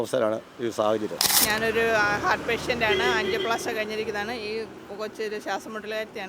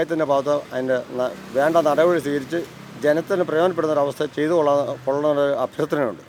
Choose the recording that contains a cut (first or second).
first